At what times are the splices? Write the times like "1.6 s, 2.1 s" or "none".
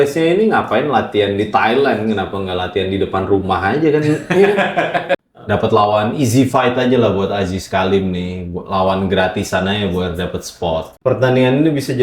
5.2 s, 10.9 s